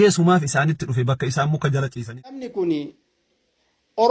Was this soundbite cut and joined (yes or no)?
yes